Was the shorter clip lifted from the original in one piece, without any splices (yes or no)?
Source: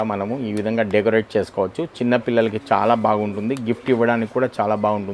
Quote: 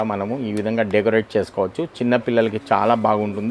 yes